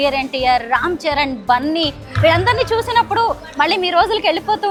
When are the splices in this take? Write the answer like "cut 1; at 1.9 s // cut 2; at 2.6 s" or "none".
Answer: none